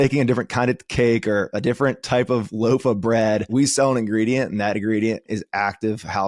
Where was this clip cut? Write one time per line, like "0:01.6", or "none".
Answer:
0:03.5
0:05.3